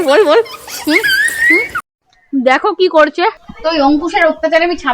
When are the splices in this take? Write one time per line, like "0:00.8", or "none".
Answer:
0:01.8
0:03.5